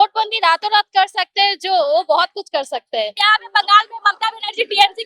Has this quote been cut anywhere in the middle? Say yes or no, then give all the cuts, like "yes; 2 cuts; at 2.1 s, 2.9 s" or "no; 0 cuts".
yes; 1 cut; at 3.2 s